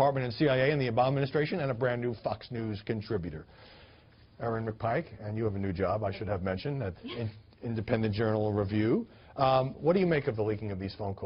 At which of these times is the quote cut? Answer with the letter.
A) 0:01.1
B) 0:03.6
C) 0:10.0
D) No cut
C